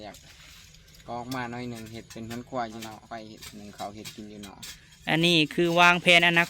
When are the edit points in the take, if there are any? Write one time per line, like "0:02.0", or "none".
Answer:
0:03.0